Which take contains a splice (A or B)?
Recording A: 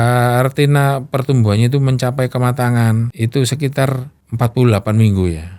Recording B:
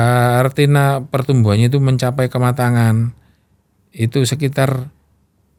A